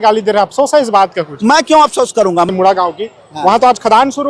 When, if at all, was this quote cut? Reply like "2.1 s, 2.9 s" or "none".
2.5 s